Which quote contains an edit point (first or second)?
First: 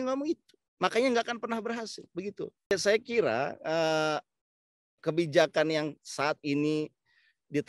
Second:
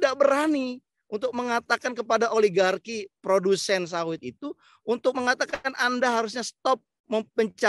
first